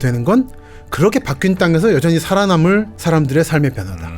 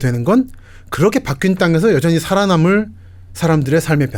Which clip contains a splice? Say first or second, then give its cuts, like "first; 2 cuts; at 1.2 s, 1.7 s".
first; 1 cut; at 2.9 s